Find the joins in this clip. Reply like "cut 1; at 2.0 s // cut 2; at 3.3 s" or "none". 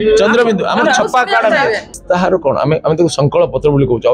cut 1; at 1.9 s